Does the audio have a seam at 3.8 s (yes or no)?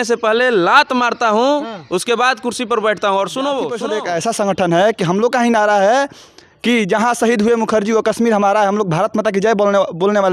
yes